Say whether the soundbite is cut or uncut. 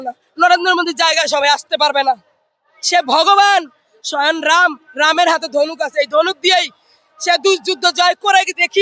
uncut